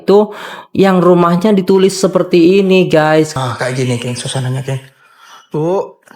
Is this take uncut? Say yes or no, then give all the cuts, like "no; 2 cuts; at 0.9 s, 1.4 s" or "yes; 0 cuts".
no; 1 cut; at 3.3 s